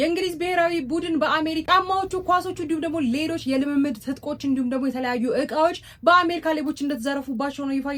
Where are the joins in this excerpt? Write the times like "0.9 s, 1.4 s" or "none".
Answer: none

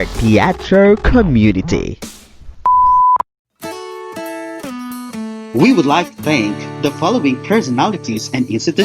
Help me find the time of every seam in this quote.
3.2 s

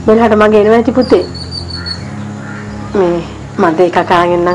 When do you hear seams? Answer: 3.4 s

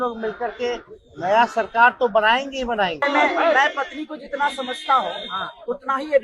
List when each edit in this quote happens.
3.1 s

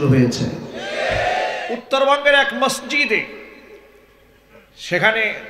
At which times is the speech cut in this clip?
1.7 s

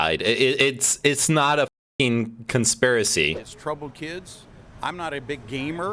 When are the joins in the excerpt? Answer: 3.3 s

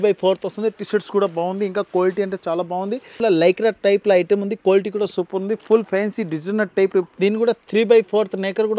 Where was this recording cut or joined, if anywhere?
3.2 s, 7.1 s

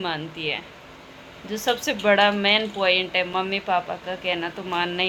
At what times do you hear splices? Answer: none

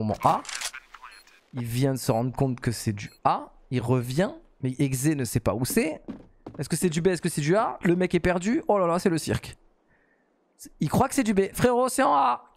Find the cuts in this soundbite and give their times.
none

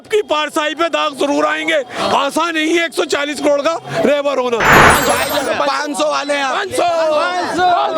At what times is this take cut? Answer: 4.8 s

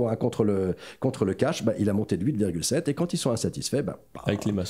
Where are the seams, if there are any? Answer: none

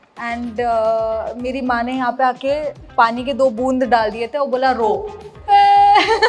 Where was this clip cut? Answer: 5.3 s

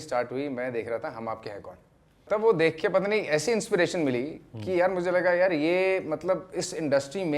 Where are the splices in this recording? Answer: 2.2 s

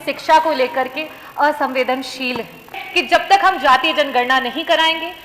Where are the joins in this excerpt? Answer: 2.9 s

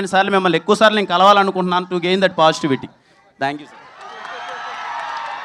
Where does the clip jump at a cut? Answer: none

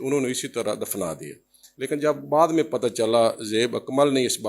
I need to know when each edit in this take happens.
none

